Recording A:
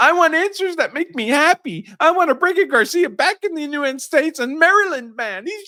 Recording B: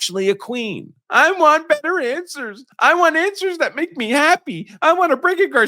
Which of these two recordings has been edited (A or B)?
B